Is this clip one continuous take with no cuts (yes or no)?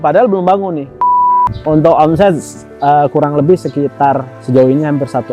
no